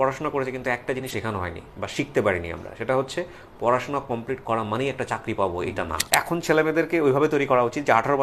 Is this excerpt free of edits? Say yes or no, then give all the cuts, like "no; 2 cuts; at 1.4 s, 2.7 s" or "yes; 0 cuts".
no; 2 cuts; at 1.1 s, 6.0 s